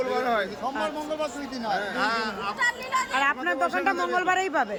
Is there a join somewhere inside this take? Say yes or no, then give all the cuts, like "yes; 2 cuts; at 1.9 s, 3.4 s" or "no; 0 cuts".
no; 0 cuts